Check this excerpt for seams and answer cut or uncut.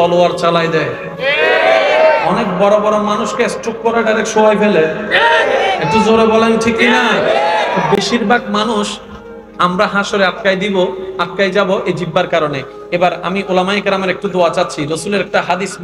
uncut